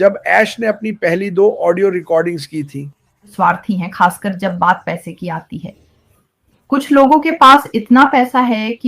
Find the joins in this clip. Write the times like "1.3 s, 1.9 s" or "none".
3.3 s